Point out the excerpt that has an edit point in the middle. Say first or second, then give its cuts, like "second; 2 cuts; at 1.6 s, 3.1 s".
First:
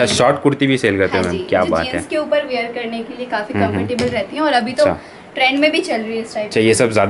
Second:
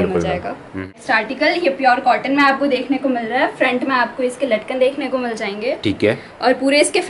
second; 1 cut; at 0.9 s